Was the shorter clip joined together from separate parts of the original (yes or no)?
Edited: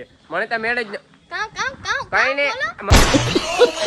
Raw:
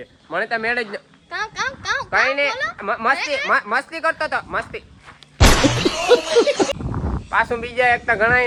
yes